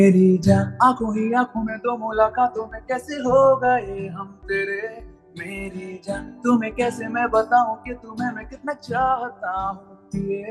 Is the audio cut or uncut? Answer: uncut